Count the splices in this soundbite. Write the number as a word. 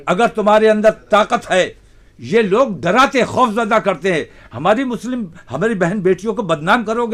zero